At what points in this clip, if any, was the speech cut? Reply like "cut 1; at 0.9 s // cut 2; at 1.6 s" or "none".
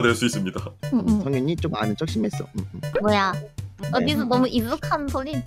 cut 1; at 3.8 s